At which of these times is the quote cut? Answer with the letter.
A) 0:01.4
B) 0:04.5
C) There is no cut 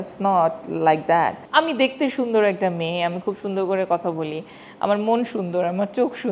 A